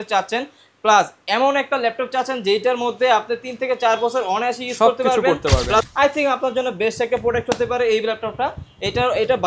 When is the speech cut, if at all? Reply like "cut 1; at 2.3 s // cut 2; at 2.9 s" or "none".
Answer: cut 1; at 5.9 s

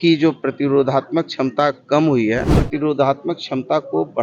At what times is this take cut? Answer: cut 1; at 2.6 s

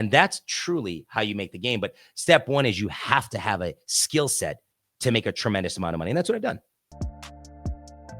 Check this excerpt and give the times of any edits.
cut 1; at 6.8 s

